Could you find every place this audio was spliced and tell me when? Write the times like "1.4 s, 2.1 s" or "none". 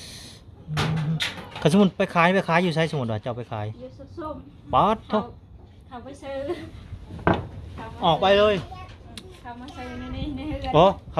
none

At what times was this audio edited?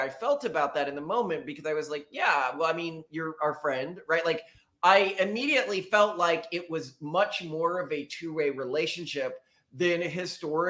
none

